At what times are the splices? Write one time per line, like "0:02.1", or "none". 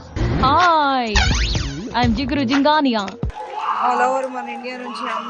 0:03.2

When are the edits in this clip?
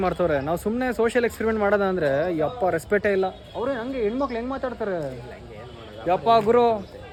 none

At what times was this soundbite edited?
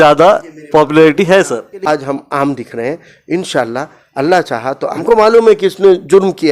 0:01.9
0:04.9

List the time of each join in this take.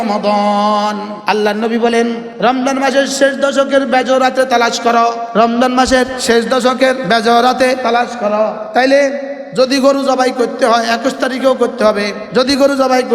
0:01.1
0:02.2
0:05.2
0:06.2
0:07.0
0:08.1
0:12.2

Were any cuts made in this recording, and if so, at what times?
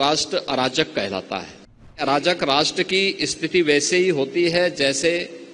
0:02.0

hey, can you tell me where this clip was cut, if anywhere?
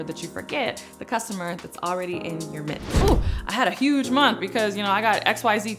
0:03.0

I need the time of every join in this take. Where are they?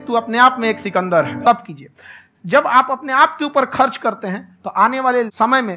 0:01.4

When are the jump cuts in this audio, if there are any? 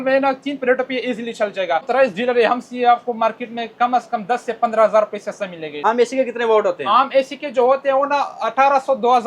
0:01.9
0:05.8

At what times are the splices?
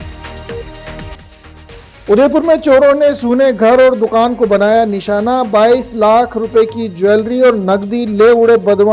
0:00.9

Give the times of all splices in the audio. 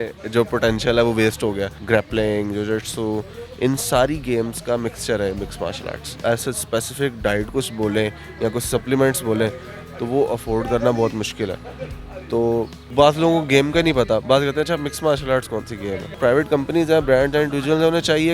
0:01.7
0:06.1
0:12.8
0:16.1

